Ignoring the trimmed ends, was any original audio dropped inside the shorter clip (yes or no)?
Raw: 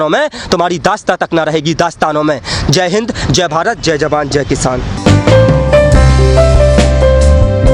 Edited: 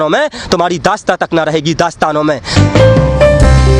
yes